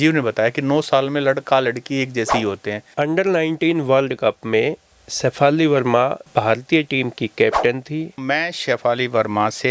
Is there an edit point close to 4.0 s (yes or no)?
no